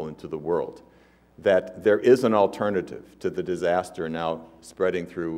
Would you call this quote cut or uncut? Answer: cut